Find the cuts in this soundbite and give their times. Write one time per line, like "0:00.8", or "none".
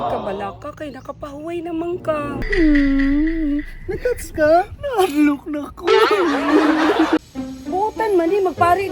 0:02.4
0:07.2